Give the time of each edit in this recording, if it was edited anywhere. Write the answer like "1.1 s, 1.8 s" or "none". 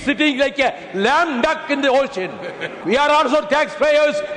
2.7 s